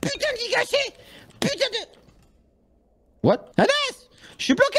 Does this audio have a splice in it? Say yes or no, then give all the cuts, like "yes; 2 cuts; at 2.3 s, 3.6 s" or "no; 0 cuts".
yes; 1 cut; at 3.5 s